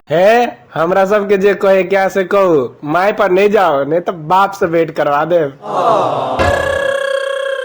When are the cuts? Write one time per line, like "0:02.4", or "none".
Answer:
0:06.5